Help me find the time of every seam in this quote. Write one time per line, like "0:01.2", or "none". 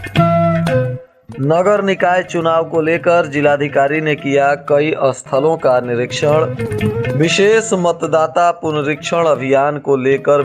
0:01.0